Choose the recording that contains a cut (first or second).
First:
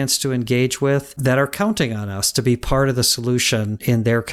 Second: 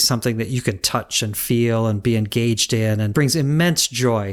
second